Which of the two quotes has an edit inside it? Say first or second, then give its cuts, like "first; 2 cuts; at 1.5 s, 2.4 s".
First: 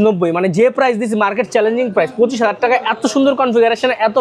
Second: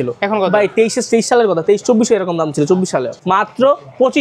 second; 1 cut; at 3.1 s